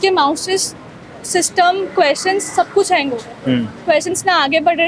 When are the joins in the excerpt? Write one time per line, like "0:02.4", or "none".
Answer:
none